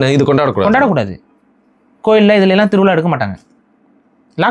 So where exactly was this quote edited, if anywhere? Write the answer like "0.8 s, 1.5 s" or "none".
none